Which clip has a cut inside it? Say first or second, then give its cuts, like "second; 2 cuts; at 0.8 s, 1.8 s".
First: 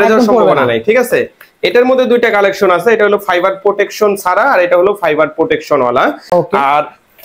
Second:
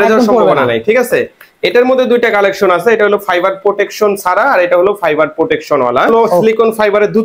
second; 1 cut; at 6.1 s